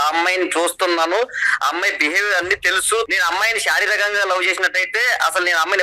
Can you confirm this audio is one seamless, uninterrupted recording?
no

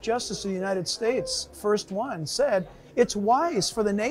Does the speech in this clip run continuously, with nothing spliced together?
yes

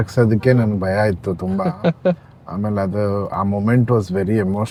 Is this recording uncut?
yes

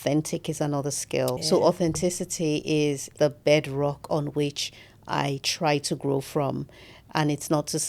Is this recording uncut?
no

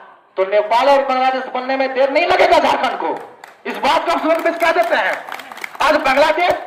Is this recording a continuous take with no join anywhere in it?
yes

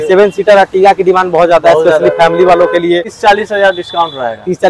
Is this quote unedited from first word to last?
no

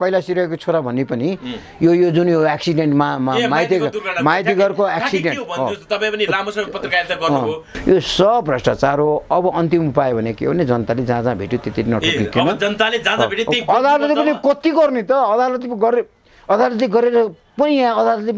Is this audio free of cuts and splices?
no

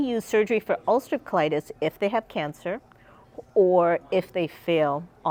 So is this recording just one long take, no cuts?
yes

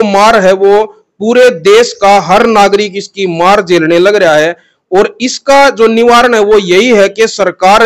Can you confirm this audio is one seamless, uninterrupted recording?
yes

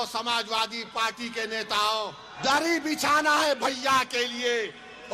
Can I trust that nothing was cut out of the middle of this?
no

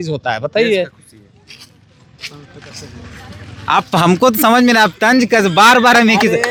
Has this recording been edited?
no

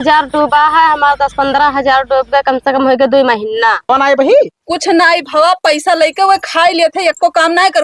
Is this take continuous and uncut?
no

